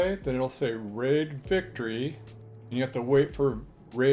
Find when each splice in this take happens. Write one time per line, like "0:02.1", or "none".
none